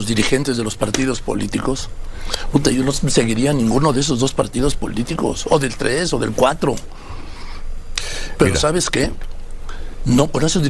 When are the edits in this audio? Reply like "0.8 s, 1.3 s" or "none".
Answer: none